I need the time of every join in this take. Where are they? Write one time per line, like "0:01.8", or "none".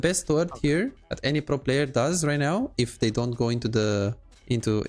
0:01.1